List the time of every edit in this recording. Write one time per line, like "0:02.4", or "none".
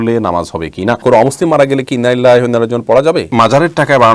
0:01.0
0:03.3